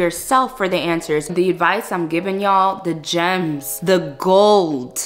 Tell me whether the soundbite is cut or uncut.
cut